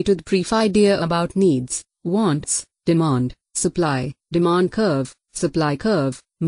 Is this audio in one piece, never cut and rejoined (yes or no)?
no